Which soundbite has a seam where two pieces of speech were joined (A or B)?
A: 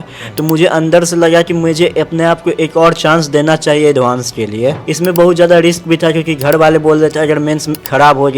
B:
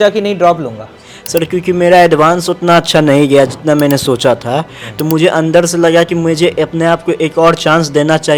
A